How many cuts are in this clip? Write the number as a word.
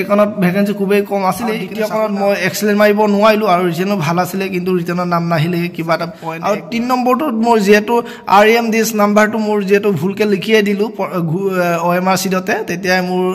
two